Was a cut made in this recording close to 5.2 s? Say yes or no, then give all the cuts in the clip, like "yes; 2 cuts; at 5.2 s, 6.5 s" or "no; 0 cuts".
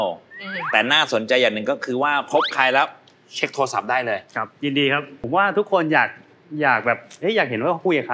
yes; 1 cut; at 5.2 s